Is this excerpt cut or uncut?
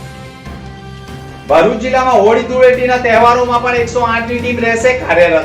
cut